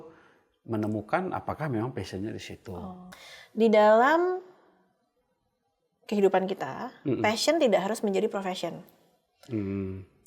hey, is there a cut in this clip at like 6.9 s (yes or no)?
no